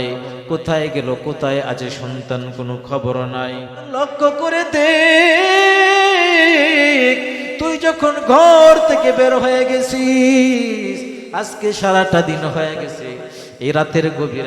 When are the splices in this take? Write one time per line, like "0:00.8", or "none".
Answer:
0:03.9

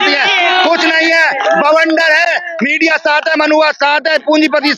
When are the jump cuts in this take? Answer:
none

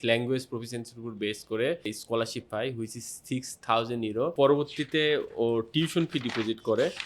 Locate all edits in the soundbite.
0:01.9
0:04.3

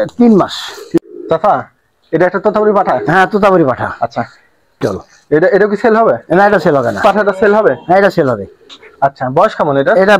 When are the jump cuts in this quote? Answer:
0:01.0
0:04.8
0:07.0

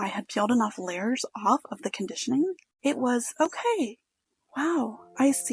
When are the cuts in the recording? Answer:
0:02.7

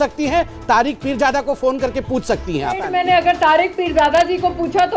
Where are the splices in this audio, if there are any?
0:02.9

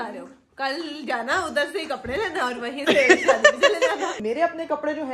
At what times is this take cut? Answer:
0:04.2

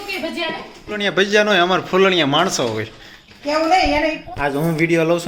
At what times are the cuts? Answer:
0:01.2
0:04.2

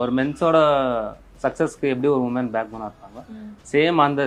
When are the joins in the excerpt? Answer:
none

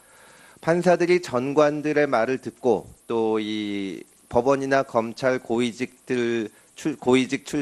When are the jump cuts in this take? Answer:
none

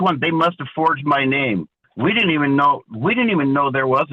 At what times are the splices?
0:01.8

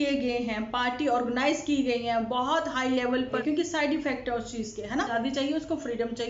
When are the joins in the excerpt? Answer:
0:03.4
0:05.1

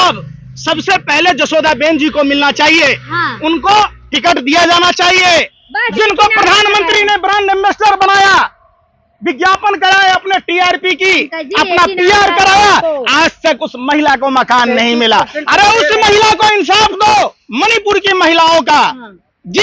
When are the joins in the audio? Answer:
0:05.6
0:17.4

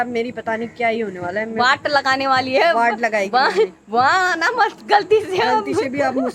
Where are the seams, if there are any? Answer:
none

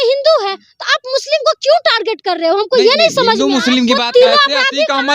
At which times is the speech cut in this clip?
0:04.0

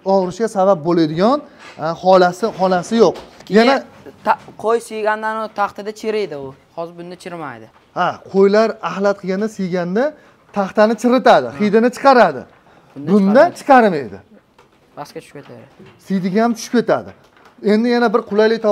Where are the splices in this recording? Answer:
0:03.3

